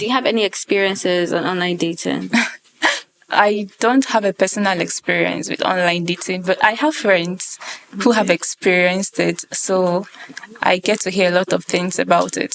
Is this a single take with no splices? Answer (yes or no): yes